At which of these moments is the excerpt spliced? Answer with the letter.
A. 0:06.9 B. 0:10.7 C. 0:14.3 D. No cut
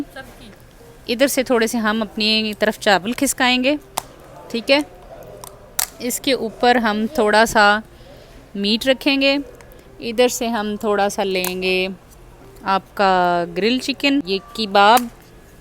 C